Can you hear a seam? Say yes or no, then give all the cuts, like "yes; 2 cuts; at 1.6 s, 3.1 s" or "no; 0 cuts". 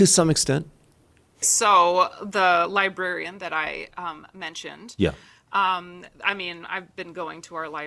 yes; 1 cut; at 1.5 s